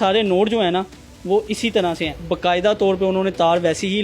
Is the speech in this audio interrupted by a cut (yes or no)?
yes